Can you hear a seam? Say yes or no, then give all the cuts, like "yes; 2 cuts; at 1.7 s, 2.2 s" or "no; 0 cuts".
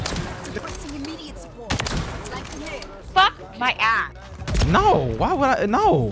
no; 0 cuts